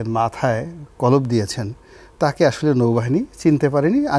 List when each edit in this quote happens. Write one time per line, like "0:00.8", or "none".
none